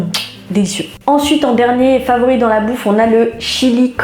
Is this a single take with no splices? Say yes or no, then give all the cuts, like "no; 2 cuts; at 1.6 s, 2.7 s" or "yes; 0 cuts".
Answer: yes; 0 cuts